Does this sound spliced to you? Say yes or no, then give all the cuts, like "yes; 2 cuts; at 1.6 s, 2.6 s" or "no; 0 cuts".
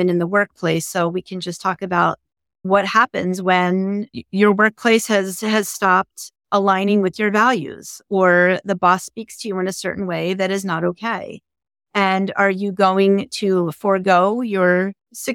yes; 2 cuts; at 2.6 s, 4.2 s